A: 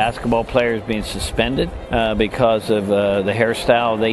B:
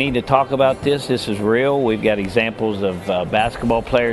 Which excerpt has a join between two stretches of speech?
A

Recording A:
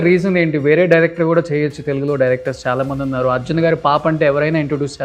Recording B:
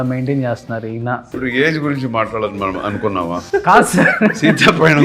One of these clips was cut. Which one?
B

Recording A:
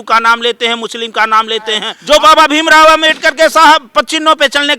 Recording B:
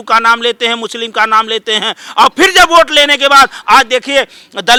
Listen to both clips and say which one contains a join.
A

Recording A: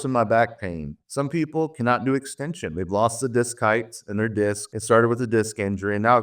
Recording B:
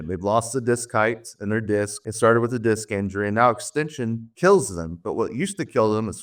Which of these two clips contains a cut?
A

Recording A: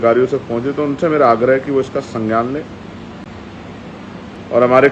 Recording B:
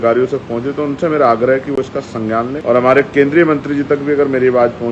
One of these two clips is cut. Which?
B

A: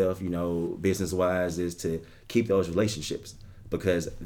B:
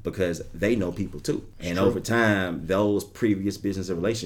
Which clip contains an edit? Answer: B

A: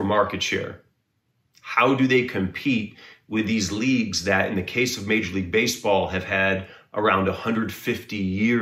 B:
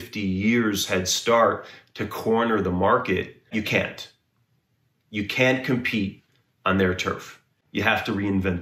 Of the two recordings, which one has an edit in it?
B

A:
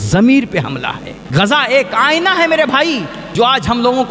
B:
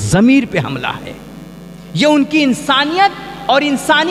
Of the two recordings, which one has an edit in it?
A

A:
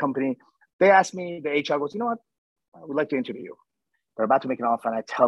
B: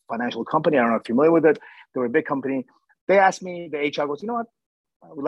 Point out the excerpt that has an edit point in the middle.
A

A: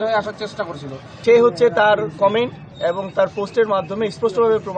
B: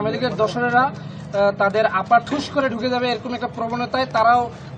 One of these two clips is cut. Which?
A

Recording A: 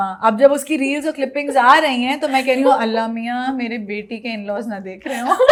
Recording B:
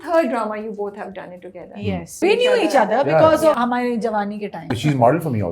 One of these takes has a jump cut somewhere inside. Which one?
B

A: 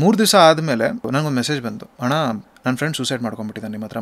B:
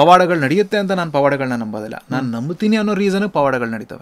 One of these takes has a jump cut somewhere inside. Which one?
A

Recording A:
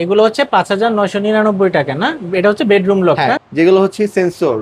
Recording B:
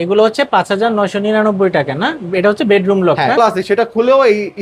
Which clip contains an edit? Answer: A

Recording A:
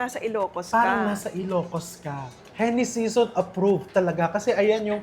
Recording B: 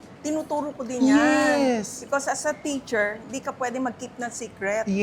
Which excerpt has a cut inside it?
A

